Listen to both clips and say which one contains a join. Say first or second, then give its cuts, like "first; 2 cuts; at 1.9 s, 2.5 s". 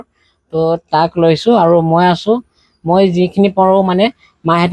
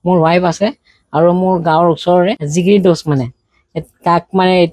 second; 1 cut; at 2.4 s